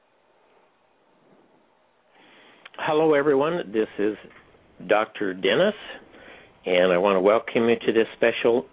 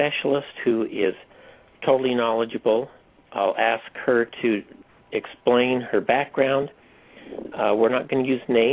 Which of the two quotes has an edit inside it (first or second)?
second